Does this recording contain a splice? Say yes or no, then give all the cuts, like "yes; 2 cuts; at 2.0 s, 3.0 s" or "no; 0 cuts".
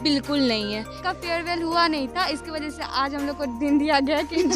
yes; 1 cut; at 1.0 s